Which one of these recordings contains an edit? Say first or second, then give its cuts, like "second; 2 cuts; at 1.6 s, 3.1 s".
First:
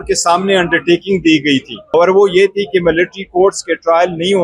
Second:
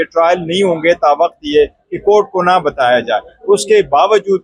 first; 1 cut; at 1.9 s